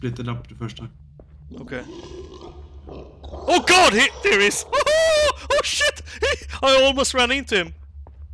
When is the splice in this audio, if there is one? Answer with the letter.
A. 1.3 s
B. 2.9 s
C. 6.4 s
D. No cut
D